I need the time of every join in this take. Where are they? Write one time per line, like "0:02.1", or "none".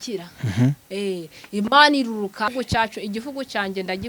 0:02.5